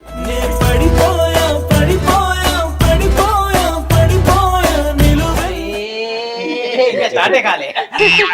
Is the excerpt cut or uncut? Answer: uncut